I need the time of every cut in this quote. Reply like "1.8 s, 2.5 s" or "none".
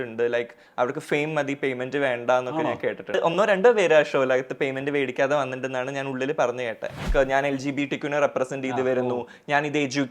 3.2 s, 7.1 s